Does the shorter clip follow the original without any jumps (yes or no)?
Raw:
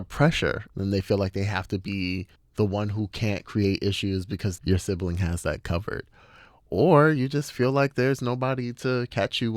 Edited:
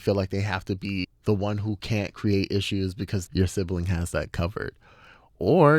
no